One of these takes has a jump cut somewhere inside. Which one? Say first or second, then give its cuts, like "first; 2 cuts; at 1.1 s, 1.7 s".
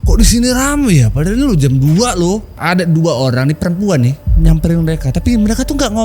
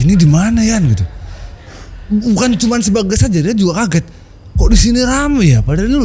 first; 1 cut; at 2.6 s